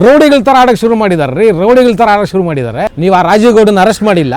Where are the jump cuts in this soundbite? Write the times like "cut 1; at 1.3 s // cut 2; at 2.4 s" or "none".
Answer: cut 1; at 2.9 s